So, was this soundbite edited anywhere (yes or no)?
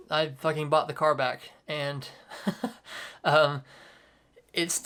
no